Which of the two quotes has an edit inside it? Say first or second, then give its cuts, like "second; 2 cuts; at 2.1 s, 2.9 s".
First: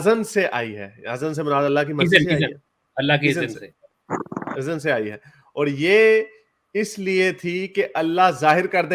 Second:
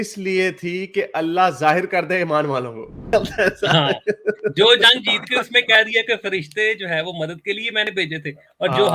second; 1 cut; at 3.1 s